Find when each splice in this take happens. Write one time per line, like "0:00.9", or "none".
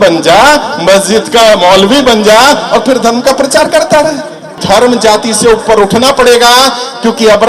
0:04.5